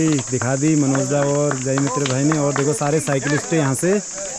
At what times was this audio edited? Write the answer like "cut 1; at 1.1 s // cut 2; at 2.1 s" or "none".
none